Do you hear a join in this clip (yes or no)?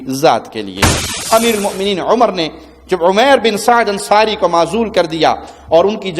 yes